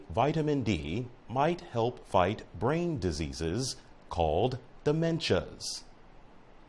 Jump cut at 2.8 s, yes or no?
no